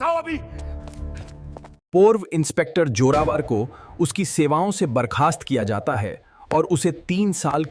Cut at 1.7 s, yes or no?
yes